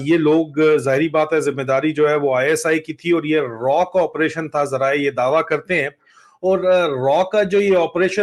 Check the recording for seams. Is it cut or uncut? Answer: uncut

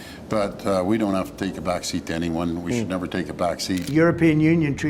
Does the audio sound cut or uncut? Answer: cut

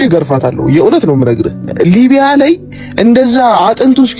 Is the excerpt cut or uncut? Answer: cut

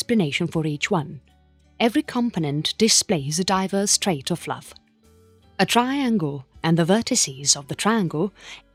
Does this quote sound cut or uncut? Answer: uncut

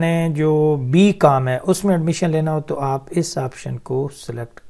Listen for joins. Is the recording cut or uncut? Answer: uncut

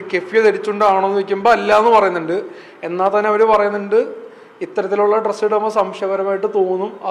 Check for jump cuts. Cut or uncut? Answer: uncut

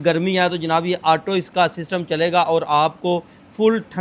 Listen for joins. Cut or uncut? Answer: uncut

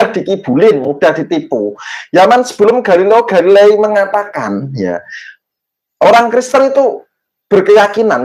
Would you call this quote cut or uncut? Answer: uncut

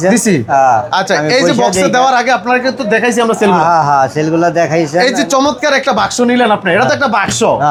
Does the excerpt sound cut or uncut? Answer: uncut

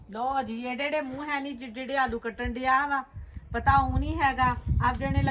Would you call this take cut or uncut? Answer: uncut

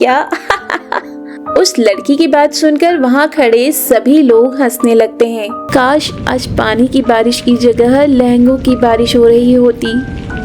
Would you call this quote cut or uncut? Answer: cut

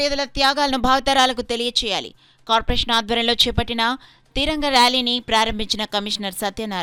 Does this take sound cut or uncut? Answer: uncut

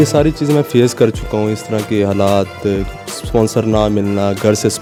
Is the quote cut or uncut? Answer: uncut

